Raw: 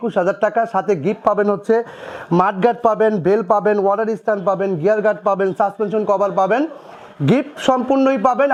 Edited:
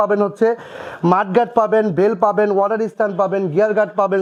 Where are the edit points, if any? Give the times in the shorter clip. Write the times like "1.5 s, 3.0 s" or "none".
none